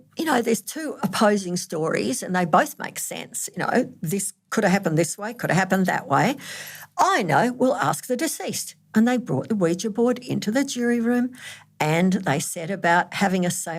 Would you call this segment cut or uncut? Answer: uncut